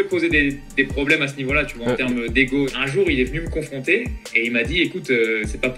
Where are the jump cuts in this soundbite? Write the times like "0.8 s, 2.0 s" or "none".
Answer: 2.8 s